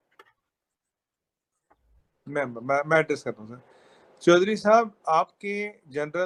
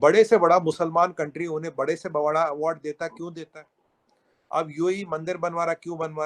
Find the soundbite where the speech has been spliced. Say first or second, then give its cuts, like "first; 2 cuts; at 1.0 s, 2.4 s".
second; 1 cut; at 2.8 s